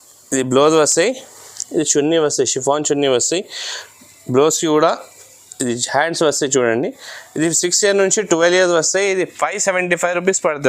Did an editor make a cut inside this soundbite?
no; 0 cuts

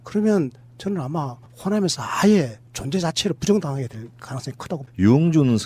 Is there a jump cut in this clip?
no; 0 cuts

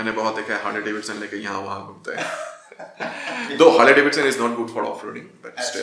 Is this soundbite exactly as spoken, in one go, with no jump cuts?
yes; 0 cuts

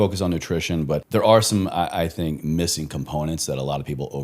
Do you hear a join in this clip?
yes; 1 cut; at 1.0 s

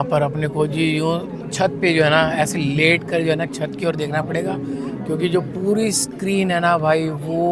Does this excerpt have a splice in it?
no; 0 cuts

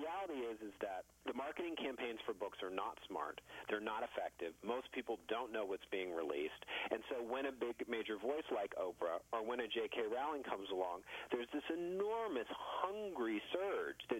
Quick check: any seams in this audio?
yes; 1 cut; at 1.1 s

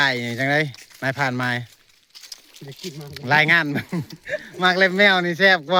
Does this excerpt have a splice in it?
no; 0 cuts

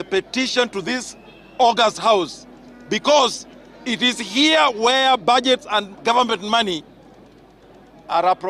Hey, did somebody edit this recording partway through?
no; 0 cuts

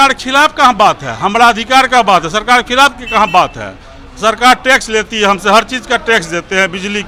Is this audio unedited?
yes; 0 cuts

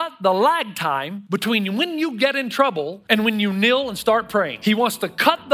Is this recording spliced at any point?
yes; 3 cuts; at 1.1 s, 3.0 s, 4.5 s

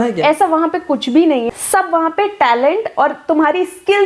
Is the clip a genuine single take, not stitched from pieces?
no; 1 cut; at 1.5 s

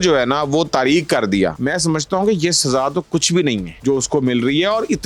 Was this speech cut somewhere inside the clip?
yes; 2 cuts; at 1.6 s, 3.7 s

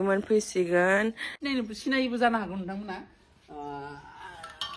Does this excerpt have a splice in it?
yes; 1 cut; at 1.3 s

